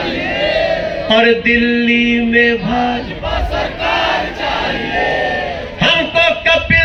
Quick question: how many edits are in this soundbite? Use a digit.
0